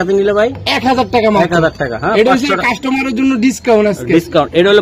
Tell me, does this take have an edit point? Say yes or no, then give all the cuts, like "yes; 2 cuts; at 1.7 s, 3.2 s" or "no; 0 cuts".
no; 0 cuts